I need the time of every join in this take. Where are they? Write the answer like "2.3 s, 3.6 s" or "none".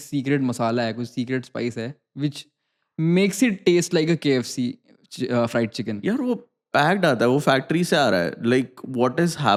none